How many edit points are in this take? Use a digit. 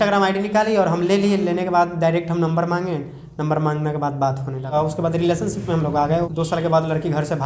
2